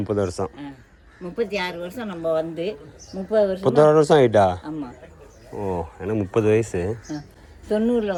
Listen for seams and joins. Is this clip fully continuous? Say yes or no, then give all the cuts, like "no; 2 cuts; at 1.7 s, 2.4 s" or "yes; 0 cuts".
yes; 0 cuts